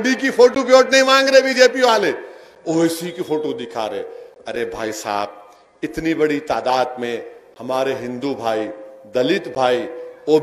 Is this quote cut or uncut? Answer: uncut